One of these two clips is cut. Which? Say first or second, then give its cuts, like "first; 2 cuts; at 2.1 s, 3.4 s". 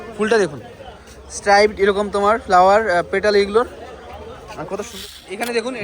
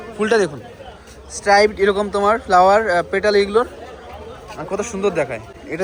first; 1 cut; at 4.9 s